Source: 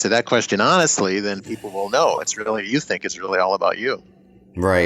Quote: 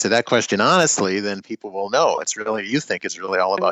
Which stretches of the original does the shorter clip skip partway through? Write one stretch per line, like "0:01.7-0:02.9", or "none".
none